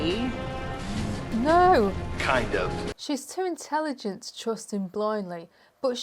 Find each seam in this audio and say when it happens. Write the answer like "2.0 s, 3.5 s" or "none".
2.9 s